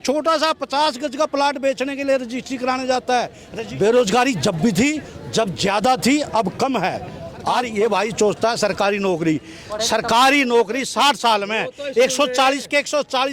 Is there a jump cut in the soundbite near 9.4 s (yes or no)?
no